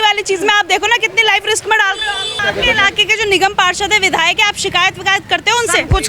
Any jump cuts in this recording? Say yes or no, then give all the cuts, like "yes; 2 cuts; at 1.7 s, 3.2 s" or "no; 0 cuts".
yes; 1 cut; at 2.4 s